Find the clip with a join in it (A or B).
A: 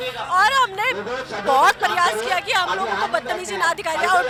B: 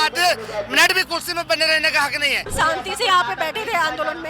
B